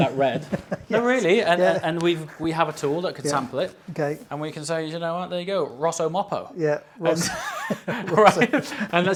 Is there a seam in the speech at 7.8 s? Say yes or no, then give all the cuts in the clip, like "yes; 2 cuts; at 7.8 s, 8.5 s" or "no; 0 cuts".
no; 0 cuts